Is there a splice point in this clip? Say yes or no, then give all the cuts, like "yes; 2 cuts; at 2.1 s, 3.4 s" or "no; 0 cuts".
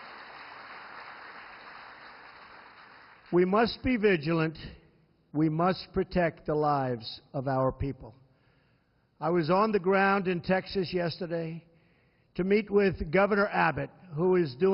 yes; 1 cut; at 12.8 s